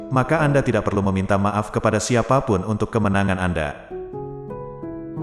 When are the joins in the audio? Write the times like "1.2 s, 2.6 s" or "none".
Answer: 3.8 s